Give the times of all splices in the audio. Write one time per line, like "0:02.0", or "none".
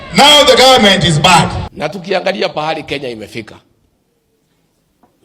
0:01.7